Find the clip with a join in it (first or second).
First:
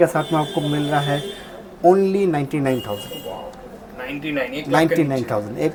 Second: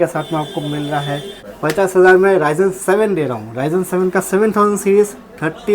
second